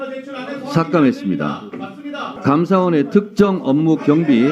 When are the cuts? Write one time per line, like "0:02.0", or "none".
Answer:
0:02.3